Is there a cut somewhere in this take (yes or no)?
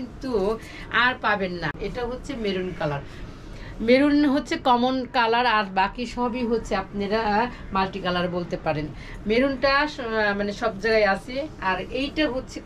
yes